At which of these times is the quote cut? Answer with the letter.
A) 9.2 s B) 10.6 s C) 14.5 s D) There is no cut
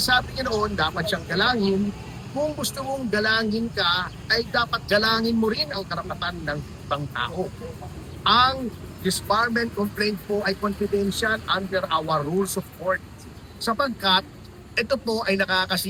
D